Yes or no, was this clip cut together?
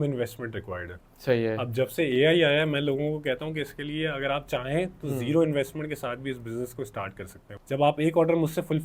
yes